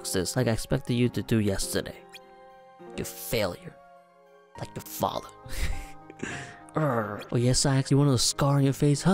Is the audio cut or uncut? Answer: uncut